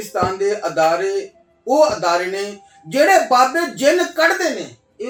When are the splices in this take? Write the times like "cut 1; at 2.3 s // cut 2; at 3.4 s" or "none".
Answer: none